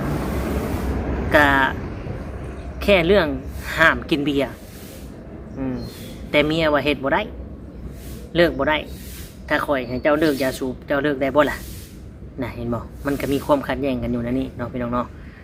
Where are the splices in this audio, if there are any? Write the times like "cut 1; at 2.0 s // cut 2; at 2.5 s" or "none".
none

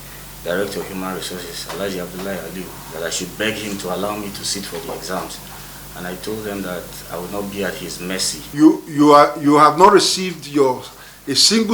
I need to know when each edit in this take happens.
cut 1; at 8.4 s

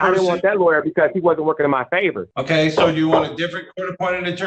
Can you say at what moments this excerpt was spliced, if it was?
cut 1; at 2.3 s

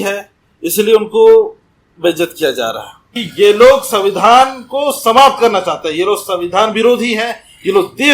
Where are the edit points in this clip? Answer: cut 1; at 3.2 s

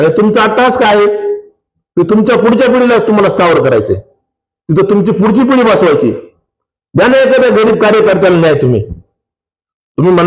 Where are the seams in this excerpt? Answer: none

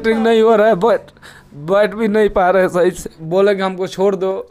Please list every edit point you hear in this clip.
none

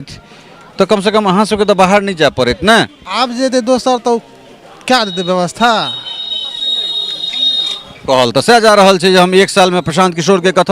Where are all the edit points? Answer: cut 1; at 3.0 s

